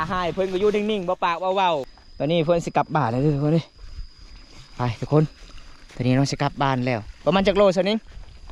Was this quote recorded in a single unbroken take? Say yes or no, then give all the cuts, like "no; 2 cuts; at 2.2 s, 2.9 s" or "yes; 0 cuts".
no; 1 cut; at 2.0 s